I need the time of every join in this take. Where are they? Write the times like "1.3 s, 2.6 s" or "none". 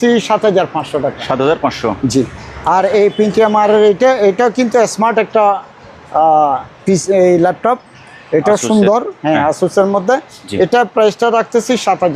none